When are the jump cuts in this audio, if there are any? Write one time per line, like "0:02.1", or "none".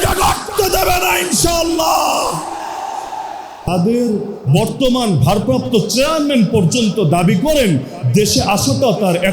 0:03.7